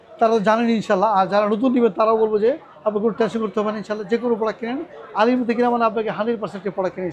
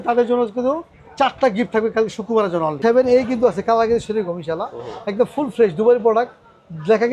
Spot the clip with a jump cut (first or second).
second